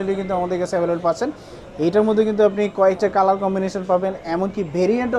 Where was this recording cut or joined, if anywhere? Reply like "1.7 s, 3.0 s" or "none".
none